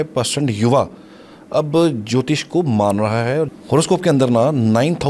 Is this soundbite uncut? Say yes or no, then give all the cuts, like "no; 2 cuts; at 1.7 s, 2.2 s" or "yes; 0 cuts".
no; 1 cut; at 3.5 s